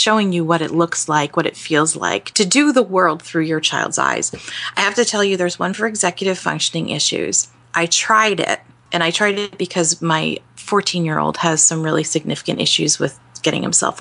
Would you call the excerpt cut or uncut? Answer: uncut